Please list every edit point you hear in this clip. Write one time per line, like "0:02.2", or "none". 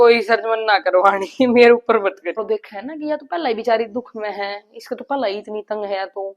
0:02.4